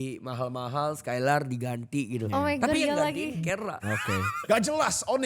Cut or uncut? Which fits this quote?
cut